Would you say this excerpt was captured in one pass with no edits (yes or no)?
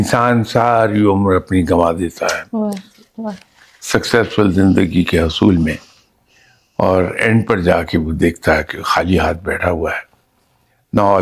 yes